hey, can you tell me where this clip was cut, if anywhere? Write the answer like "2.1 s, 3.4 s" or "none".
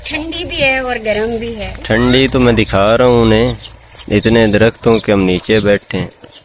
none